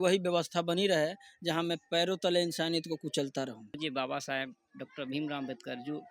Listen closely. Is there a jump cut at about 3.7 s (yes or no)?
yes